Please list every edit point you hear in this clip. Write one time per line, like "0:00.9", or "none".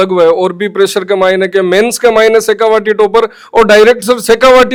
none